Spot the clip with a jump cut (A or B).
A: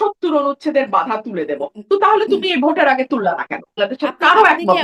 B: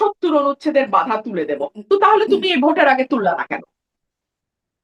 A